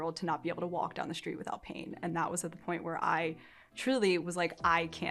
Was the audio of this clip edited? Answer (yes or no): no